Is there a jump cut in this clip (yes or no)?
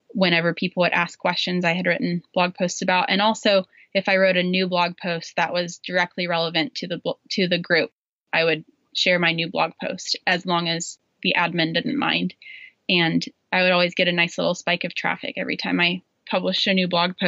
yes